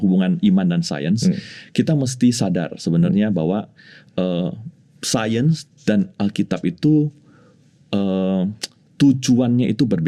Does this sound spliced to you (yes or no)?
no